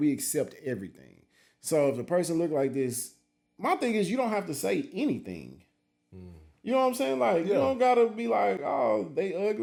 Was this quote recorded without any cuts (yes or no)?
yes